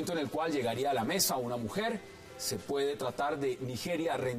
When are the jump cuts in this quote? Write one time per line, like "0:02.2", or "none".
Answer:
0:02.1